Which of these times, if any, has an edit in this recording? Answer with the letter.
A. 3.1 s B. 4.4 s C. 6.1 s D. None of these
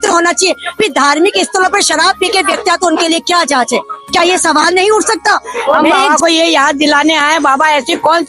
C